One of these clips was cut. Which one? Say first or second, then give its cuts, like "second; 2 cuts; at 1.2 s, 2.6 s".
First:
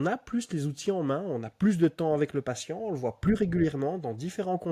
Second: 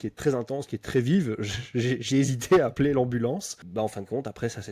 second; 1 cut; at 3.6 s